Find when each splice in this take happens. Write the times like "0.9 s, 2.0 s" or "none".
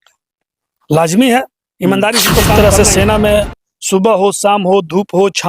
2.6 s